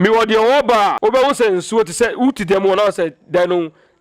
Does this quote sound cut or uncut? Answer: cut